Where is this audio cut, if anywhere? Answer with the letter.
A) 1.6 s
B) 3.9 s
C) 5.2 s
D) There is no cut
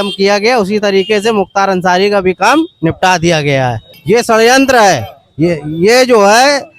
B